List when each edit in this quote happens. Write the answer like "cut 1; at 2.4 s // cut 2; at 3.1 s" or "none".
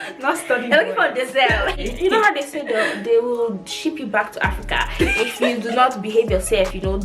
cut 1; at 1.8 s